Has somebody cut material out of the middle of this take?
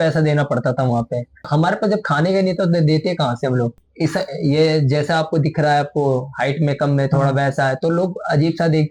yes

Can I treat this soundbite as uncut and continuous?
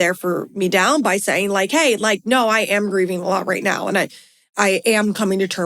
no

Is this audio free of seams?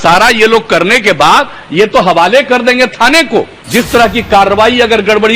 no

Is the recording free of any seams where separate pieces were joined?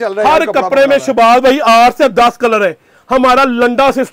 yes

